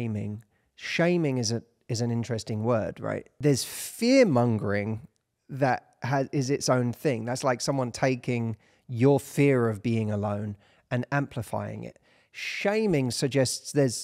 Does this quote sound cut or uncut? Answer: cut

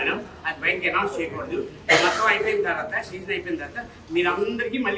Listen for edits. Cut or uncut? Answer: uncut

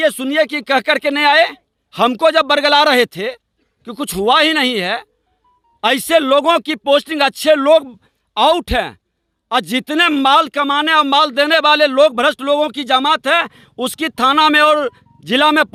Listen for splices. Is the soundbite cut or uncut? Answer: uncut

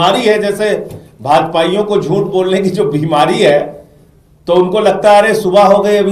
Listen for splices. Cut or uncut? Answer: uncut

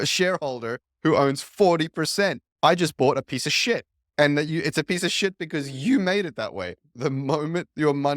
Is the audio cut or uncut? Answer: cut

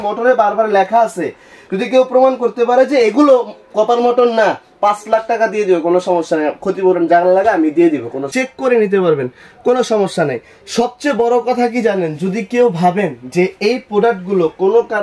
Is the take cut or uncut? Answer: cut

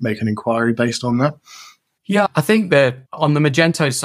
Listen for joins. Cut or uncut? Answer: cut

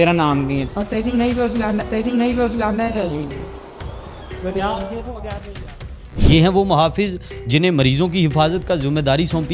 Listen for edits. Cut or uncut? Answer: uncut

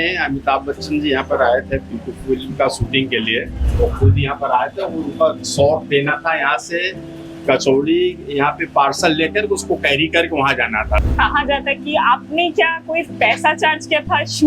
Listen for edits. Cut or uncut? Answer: cut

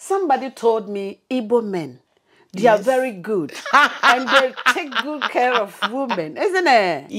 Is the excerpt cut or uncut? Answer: uncut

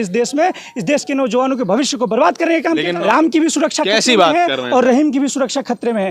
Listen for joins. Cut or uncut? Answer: cut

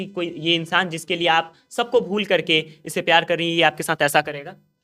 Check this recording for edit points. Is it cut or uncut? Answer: uncut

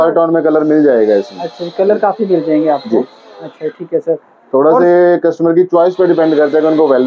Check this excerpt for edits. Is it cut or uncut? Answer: uncut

